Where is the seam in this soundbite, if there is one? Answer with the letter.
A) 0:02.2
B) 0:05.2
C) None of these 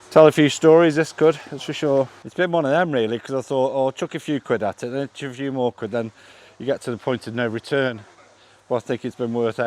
A